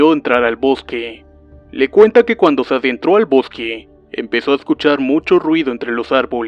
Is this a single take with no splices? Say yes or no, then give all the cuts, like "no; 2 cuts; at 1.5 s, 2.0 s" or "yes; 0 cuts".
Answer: no; 1 cut; at 5.1 s